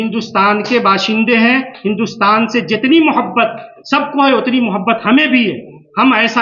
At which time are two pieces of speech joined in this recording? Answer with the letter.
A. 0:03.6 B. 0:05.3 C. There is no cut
C